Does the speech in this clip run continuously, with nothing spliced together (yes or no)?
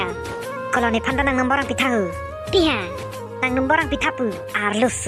yes